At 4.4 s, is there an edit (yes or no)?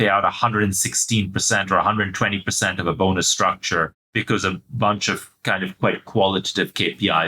yes